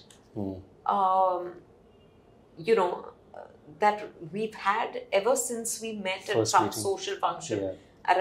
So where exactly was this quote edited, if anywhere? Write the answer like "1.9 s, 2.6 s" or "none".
none